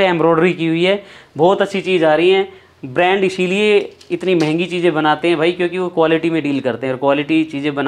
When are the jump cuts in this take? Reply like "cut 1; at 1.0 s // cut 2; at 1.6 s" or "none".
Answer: none